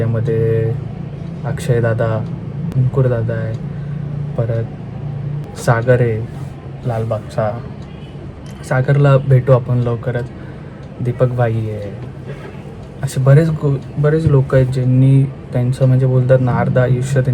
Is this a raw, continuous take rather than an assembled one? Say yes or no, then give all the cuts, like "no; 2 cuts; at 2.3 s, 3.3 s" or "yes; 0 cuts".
no; 2 cuts; at 2.7 s, 5.3 s